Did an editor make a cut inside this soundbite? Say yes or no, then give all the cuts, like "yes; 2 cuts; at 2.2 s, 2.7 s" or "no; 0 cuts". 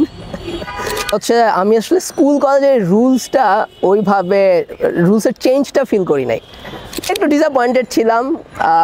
yes; 2 cuts; at 1.1 s, 7.1 s